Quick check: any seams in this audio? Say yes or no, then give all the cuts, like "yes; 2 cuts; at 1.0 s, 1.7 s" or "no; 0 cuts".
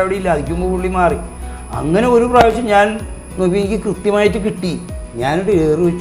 yes; 1 cut; at 4.9 s